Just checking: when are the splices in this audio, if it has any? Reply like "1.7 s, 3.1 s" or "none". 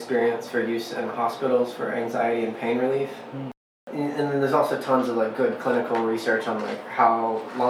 3.8 s